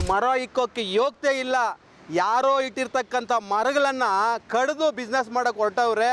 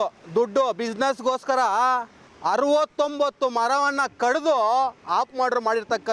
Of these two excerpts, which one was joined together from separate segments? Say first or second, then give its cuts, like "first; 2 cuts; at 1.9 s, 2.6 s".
second; 1 cut; at 2.3 s